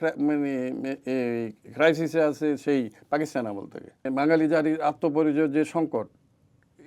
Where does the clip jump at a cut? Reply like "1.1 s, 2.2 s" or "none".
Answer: 4.0 s